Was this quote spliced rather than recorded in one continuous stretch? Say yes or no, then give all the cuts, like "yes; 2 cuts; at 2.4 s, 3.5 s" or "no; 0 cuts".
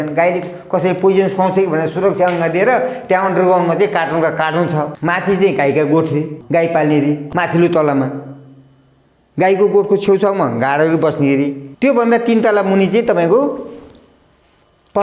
yes; 4 cuts; at 4.9 s, 6.4 s, 7.3 s, 11.6 s